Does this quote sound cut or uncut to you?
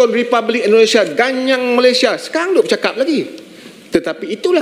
uncut